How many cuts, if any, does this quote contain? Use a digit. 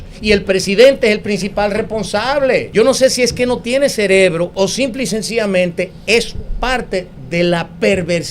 2